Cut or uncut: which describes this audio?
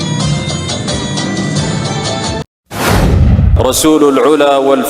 cut